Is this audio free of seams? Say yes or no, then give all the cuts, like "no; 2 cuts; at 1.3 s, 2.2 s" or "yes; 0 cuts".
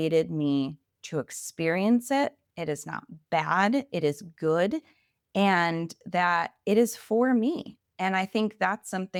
yes; 0 cuts